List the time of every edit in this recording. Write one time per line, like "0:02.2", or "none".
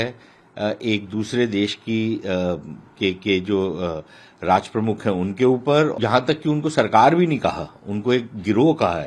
0:06.0